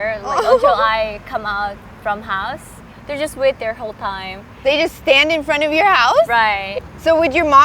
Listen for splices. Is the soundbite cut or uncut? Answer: cut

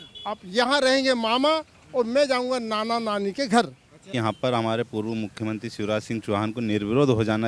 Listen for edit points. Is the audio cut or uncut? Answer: cut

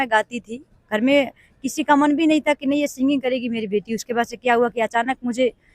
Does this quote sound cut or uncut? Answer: uncut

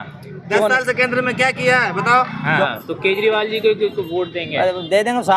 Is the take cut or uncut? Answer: cut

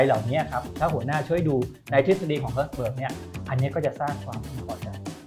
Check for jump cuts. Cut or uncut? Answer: uncut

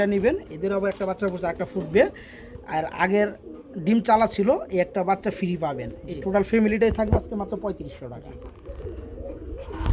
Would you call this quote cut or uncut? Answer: uncut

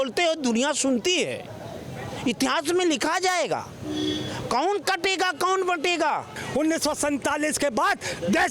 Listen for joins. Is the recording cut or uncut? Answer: cut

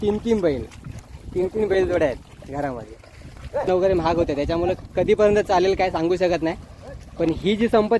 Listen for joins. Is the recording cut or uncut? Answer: cut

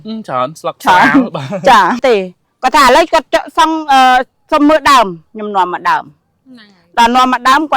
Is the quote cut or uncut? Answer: cut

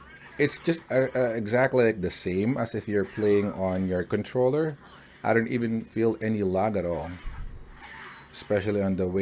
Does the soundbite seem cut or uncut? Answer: uncut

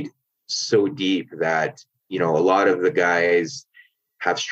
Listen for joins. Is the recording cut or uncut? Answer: uncut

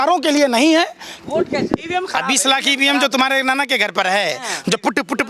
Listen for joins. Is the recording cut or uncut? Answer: cut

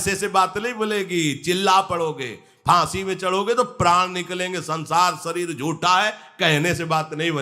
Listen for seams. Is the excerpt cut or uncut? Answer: uncut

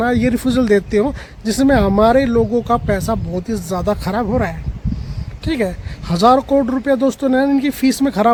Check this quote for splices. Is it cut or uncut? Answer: uncut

